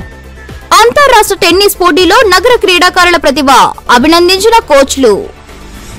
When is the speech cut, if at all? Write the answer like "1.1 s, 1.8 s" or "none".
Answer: none